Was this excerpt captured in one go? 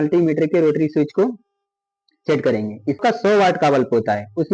no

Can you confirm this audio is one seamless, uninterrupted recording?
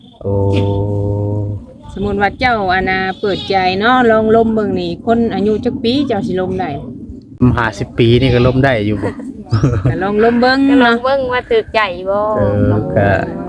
no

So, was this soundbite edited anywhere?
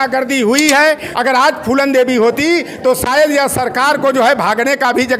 yes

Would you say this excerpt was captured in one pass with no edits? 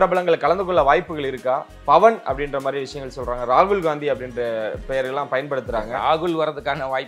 yes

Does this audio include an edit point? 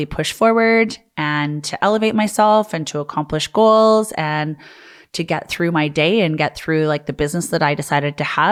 no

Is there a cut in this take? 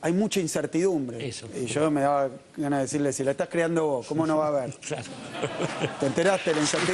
yes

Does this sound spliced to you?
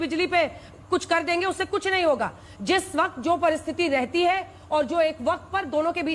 no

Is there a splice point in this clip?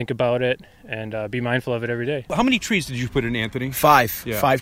yes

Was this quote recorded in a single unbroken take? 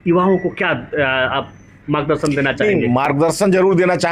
yes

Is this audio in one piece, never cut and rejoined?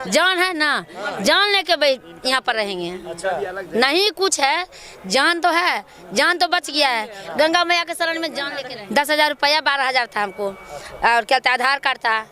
no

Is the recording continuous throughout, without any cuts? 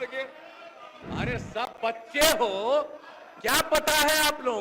no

